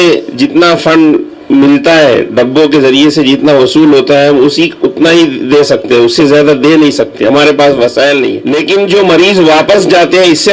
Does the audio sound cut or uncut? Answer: cut